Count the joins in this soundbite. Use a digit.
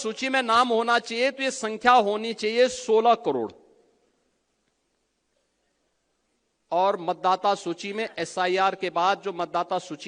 0